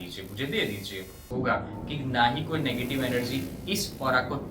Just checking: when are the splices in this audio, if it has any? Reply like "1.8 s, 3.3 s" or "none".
1.2 s